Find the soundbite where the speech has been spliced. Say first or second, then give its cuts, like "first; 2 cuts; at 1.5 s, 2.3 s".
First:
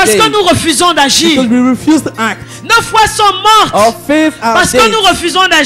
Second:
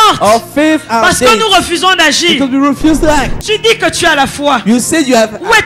second; 1 cut; at 3.4 s